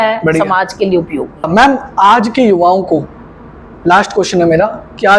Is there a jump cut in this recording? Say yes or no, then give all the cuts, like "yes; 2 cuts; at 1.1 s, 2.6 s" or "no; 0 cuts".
no; 0 cuts